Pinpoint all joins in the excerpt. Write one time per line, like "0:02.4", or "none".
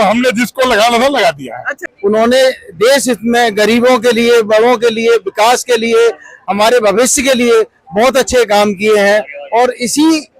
0:01.8